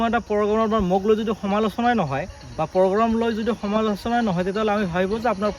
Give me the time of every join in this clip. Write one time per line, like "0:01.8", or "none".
none